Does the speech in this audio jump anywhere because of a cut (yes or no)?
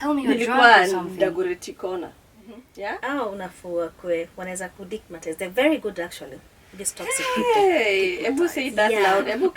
yes